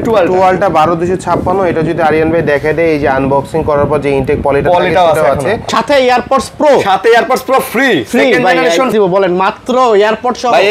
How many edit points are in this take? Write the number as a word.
two